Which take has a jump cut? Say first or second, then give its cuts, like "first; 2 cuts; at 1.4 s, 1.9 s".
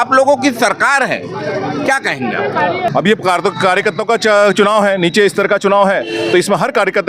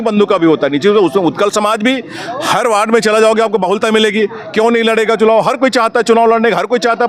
first; 1 cut; at 2.9 s